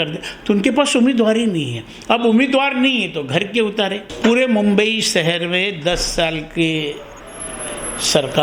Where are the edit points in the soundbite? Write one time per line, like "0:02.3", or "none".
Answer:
0:04.1